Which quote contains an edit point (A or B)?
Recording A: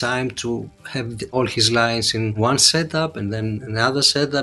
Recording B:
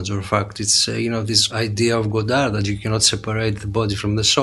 B